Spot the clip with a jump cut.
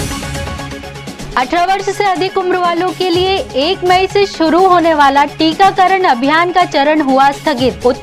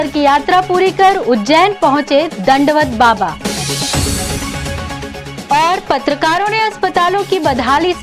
first; 1 cut; at 1.2 s

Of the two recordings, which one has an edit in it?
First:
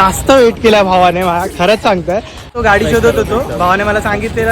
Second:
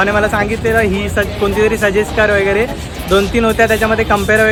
first; 1 cut; at 2.5 s

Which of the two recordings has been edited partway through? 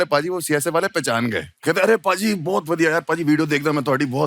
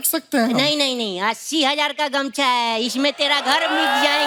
first; 1 cut; at 1.5 s

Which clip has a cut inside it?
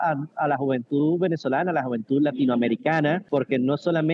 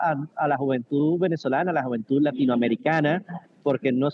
first; 1 cut; at 3.2 s

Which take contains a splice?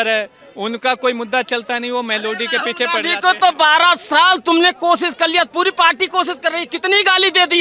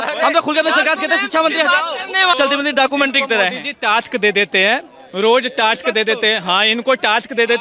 second; 1 cut; at 2.3 s

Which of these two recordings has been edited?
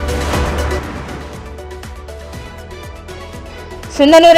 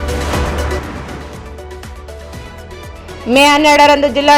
second; 1 cut; at 2.9 s

